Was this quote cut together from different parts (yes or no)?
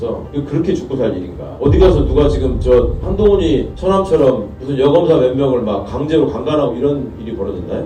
no